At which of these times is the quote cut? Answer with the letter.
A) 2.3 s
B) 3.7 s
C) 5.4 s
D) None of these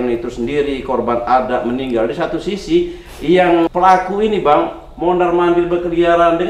B